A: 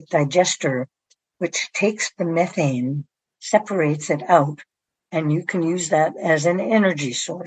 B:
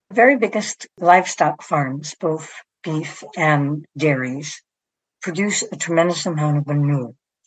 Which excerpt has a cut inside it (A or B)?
B